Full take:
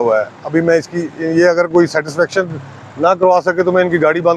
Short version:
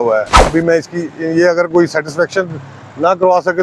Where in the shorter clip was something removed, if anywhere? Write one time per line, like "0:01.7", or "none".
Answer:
none